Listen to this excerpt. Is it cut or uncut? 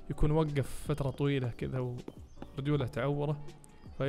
uncut